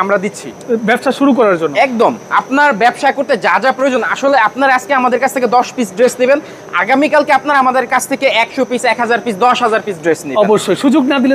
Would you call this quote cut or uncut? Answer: uncut